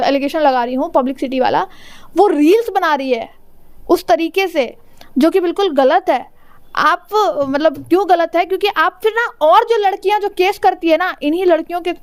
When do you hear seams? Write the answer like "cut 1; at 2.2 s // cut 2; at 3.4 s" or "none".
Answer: none